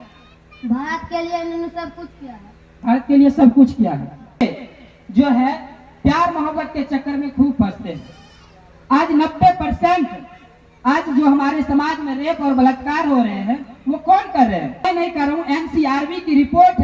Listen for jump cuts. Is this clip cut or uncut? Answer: cut